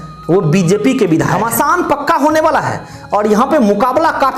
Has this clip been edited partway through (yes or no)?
yes